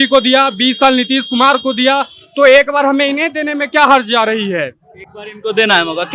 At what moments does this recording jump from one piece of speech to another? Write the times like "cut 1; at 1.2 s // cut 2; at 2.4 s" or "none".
none